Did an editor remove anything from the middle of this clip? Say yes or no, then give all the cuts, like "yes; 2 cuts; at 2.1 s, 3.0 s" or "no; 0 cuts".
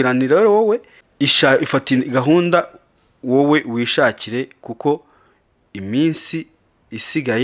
yes; 1 cut; at 1.0 s